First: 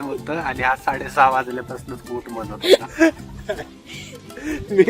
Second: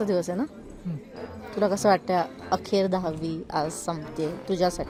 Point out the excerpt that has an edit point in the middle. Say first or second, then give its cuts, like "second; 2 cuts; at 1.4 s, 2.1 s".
first; 1 cut; at 2.9 s